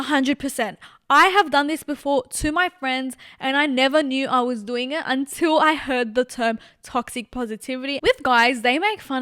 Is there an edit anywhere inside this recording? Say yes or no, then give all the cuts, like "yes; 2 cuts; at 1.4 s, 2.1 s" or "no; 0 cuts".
yes; 1 cut; at 8.0 s